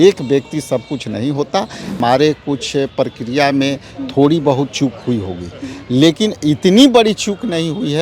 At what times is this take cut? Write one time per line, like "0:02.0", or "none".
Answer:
0:02.0